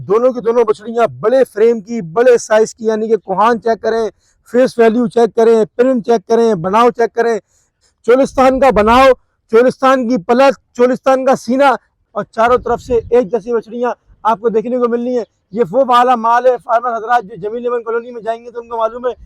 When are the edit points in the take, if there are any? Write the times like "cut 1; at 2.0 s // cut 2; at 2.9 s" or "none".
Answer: cut 1; at 7.9 s // cut 2; at 11.9 s